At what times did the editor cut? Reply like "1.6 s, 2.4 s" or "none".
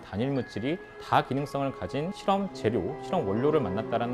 2.2 s